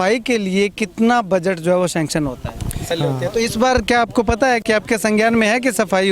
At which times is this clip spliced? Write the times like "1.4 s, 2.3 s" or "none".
2.9 s